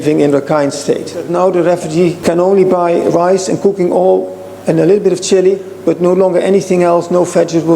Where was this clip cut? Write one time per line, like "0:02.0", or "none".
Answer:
0:01.3
0:02.2